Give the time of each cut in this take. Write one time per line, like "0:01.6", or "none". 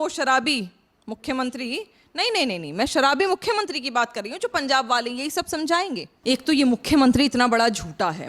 0:06.1